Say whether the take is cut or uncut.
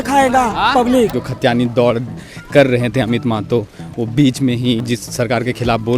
cut